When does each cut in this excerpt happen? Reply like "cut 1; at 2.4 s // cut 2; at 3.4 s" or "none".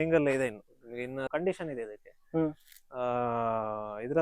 cut 1; at 1.3 s